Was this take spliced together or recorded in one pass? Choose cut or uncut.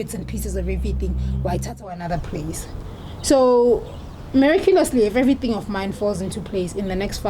cut